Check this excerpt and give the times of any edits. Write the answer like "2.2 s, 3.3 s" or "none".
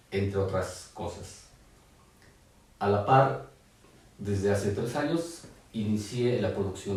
none